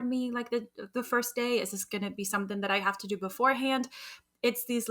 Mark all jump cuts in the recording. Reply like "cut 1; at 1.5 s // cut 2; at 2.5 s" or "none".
none